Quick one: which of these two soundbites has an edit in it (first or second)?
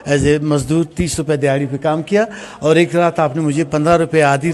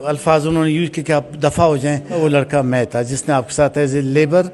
second